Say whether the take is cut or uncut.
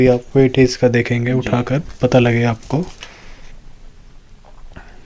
uncut